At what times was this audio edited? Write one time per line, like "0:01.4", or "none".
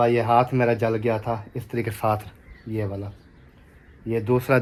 none